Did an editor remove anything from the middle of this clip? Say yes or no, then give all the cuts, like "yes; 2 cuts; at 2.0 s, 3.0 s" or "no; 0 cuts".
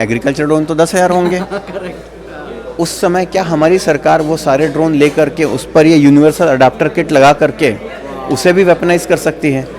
no; 0 cuts